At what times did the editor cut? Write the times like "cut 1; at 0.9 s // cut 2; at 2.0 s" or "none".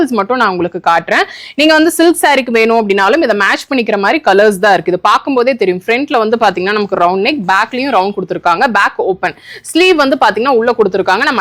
none